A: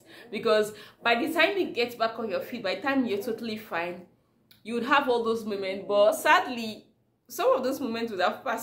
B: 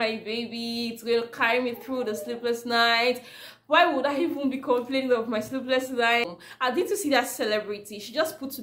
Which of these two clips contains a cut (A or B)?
B